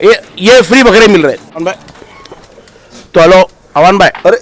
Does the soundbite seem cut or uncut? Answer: cut